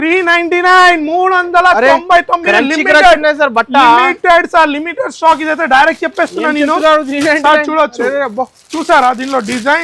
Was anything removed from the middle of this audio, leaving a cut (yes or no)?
no